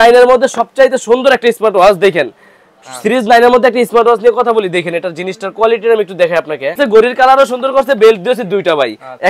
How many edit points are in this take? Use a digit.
1